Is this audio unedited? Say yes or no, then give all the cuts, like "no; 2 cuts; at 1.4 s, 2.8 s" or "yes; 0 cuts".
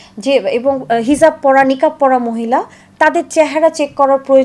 yes; 0 cuts